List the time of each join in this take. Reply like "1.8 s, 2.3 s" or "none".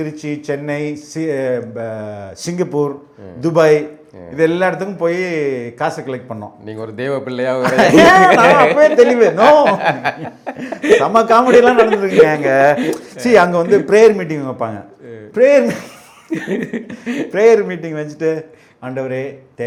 none